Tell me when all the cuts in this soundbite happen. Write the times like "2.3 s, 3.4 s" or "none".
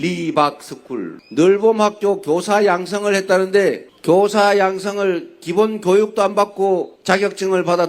1.2 s